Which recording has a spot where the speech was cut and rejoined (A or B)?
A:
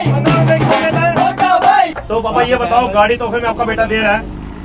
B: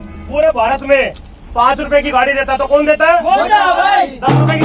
A